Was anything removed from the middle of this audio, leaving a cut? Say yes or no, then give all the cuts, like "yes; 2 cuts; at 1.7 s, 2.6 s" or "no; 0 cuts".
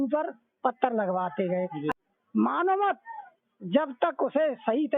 yes; 1 cut; at 1.9 s